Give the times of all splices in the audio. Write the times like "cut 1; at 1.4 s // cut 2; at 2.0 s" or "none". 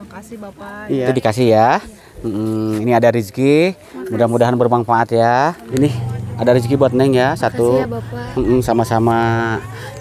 cut 1; at 1.1 s // cut 2; at 5.6 s